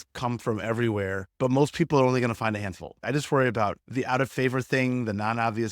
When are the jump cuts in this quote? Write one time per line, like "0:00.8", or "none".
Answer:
0:03.0